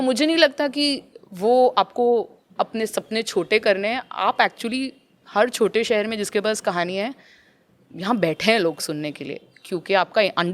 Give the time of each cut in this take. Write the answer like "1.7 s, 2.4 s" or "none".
none